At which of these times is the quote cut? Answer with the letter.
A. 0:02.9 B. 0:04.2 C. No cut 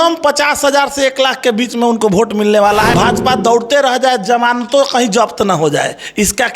A